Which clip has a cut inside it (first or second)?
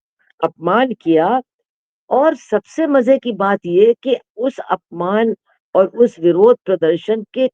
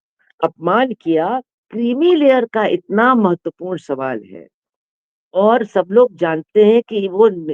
second